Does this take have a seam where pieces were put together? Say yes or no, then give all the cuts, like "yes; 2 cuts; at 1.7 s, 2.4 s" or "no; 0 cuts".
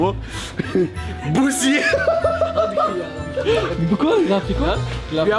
no; 0 cuts